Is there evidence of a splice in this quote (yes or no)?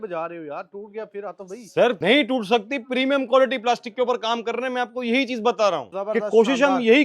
yes